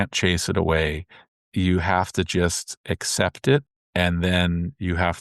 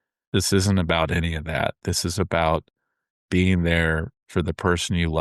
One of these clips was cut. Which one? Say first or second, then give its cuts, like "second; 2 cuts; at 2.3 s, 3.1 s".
first; 1 cut; at 3.8 s